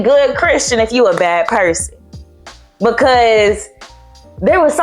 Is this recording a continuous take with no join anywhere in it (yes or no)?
yes